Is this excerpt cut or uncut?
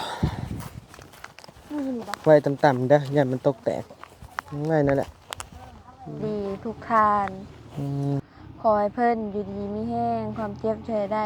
cut